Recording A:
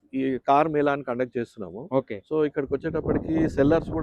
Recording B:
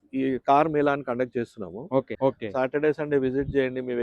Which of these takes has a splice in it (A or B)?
B